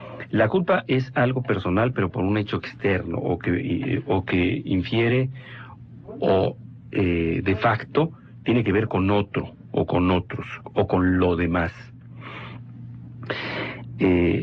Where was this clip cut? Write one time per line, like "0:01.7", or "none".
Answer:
none

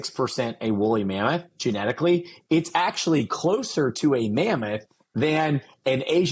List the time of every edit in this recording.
none

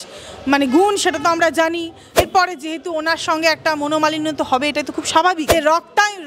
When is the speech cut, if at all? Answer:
0:02.2
0:05.5

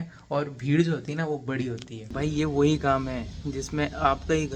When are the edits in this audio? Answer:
0:02.0

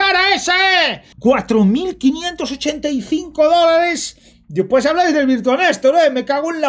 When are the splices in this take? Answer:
0:01.0

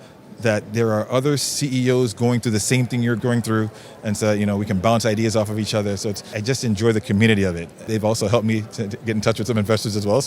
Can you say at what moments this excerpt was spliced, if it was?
0:03.2
0:06.3
0:07.8

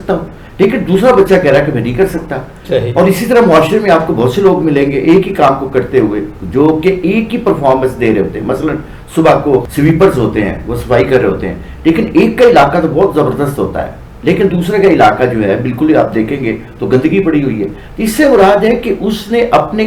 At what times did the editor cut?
none

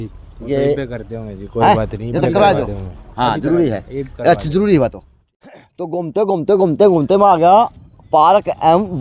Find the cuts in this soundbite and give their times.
0:05.4

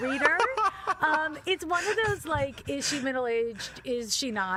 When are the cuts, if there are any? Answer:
none

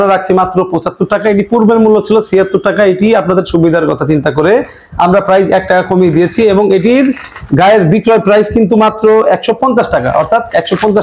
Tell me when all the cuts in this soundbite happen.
none

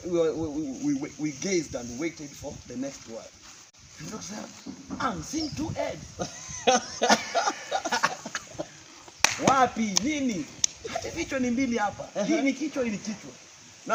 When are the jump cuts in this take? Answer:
none

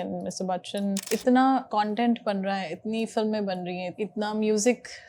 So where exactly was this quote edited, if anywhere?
0:01.0
0:01.7
0:03.9

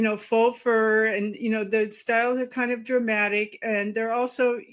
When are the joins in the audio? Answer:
none

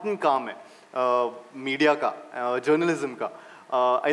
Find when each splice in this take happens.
none

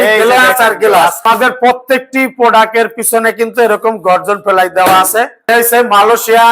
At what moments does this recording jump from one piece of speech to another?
0:01.2
0:05.4

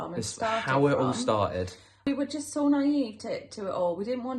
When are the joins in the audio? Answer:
0:02.0

